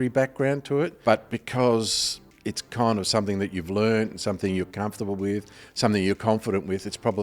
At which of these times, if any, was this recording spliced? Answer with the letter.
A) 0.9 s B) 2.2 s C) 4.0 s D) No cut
A